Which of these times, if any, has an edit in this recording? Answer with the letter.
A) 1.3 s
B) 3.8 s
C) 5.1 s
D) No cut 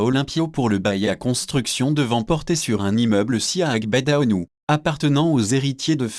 B